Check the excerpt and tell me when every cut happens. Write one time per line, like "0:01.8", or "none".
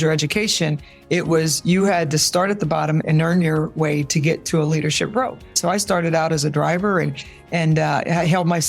0:03.0
0:05.6